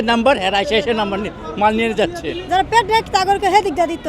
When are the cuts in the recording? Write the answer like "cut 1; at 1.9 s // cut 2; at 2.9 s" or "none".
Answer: cut 1; at 2.4 s

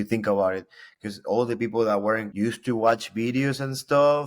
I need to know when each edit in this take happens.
cut 1; at 2.3 s

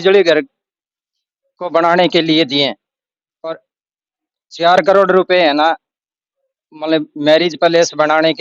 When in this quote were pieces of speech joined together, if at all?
none

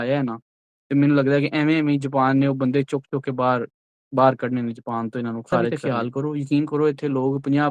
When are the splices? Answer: cut 1; at 5.7 s

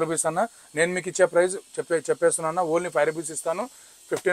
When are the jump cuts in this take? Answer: none

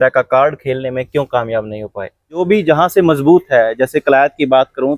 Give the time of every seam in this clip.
cut 1; at 2.4 s

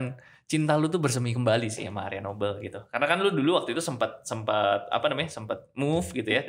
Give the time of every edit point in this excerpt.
none

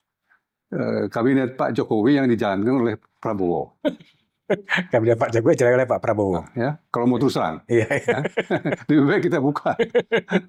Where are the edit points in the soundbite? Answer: none

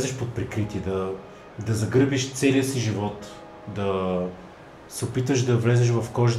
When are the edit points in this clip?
none

